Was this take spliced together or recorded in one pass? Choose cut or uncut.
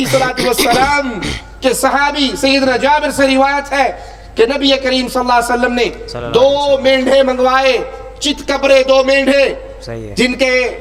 uncut